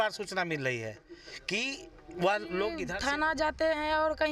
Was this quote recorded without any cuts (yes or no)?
no